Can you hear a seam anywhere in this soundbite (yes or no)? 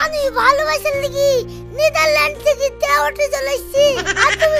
no